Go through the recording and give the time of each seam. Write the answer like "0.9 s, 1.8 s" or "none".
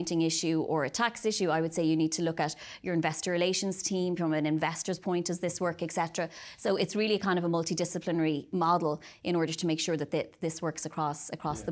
8.5 s